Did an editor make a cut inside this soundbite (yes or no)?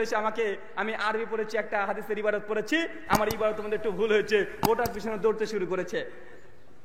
no